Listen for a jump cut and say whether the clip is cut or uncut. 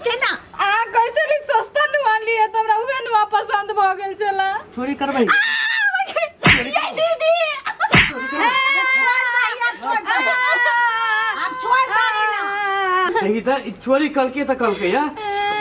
uncut